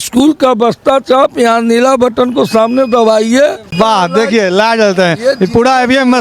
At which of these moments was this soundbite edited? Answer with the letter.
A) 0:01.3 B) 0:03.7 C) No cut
B